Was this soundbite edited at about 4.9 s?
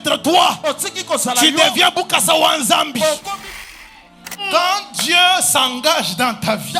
no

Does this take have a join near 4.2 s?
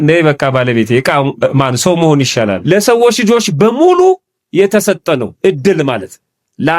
no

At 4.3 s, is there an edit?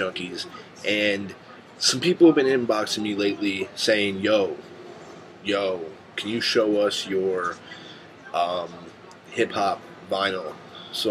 no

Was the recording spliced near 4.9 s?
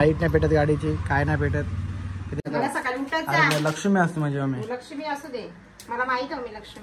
no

